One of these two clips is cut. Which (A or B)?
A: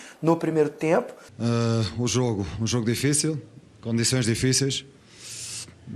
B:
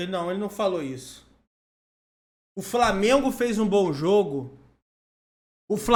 A